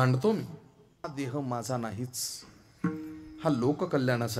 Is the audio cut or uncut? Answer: cut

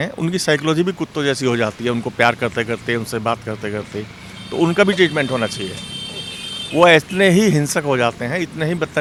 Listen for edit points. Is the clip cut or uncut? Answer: uncut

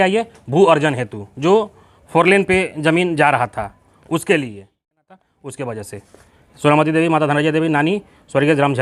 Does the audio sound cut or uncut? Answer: cut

